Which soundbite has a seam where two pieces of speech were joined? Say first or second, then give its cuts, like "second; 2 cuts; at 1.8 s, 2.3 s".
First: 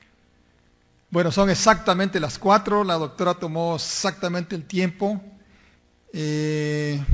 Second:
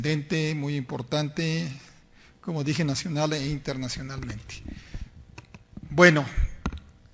second; 1 cut; at 4.3 s